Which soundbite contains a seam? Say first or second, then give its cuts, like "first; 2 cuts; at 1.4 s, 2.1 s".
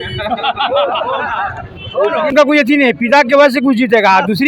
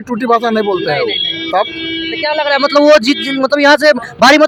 first; 1 cut; at 2.3 s